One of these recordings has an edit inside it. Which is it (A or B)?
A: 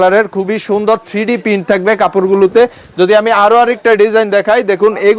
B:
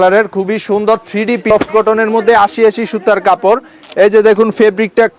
B